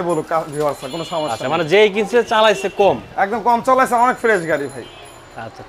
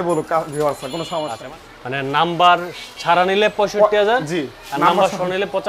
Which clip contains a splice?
second; 1 cut; at 1.4 s

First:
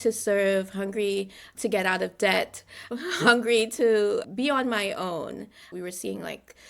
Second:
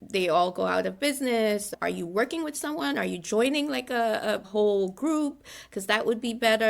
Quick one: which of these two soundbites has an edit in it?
first; 1 cut; at 5.7 s

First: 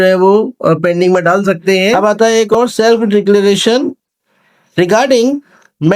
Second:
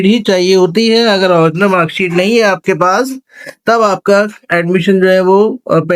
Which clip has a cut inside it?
first; 1 cut; at 2.0 s

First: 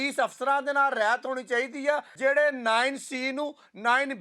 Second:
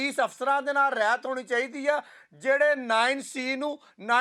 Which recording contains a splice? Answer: first; 1 cut; at 2.1 s

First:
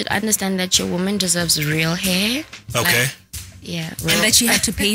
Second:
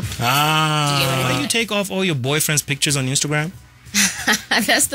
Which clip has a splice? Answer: second; 1 cut; at 1.4 s

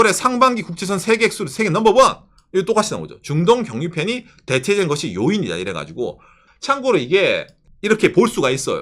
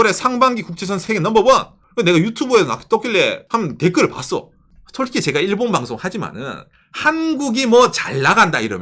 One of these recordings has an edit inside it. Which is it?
second; 3 cuts; at 1.0 s, 1.8 s, 3.4 s

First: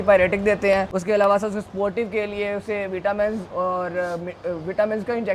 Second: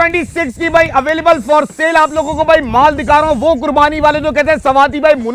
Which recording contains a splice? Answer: first; 1 cut; at 0.9 s

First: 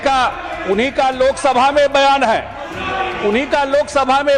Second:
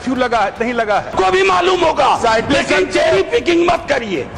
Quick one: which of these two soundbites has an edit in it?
second; 1 cut; at 1.1 s

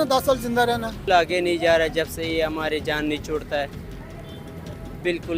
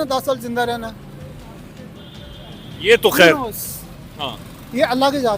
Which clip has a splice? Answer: first; 1 cut; at 1.1 s

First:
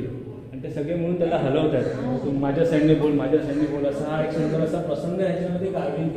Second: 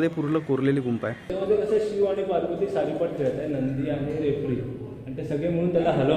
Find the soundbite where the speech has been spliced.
second; 1 cut; at 1.3 s

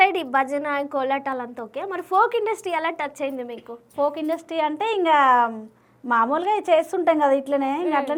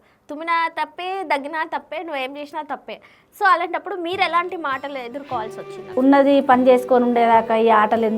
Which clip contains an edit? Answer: second; 1 cut; at 5.9 s

